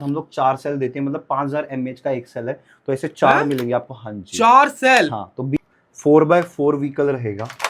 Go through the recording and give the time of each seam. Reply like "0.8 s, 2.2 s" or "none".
5.6 s